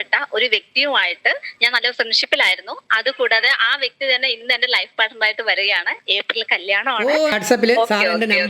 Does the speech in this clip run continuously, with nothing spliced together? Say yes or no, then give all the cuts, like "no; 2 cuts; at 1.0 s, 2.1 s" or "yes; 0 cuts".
no; 1 cut; at 7.3 s